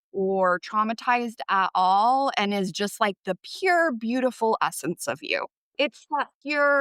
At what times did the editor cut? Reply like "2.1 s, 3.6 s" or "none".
5.9 s